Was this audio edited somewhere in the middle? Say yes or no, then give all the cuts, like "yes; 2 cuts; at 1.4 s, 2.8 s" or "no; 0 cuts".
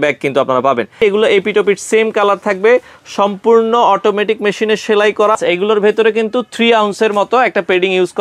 yes; 2 cuts; at 0.9 s, 5.4 s